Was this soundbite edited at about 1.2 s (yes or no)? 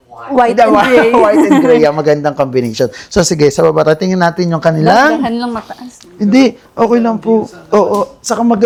no